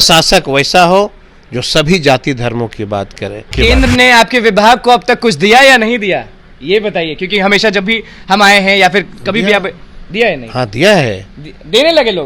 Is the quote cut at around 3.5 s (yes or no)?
yes